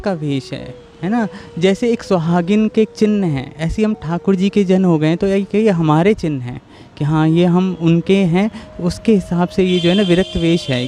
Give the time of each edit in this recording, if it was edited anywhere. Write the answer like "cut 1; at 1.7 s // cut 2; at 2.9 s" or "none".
none